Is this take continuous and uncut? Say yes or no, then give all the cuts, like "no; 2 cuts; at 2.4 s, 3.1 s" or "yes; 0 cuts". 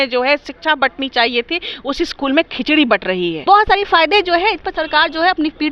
no; 1 cut; at 3.4 s